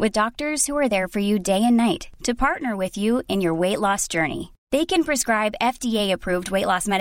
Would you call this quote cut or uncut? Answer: uncut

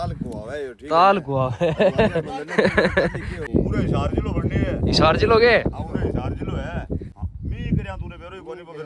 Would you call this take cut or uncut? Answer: cut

